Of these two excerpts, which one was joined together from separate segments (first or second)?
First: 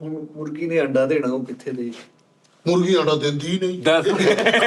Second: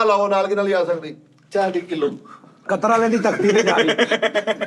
second